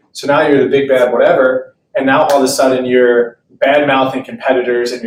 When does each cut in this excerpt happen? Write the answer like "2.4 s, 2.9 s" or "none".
none